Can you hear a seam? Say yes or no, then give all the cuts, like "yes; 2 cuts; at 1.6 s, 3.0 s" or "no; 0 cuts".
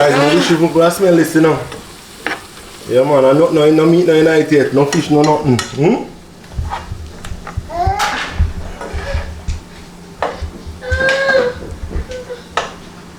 no; 0 cuts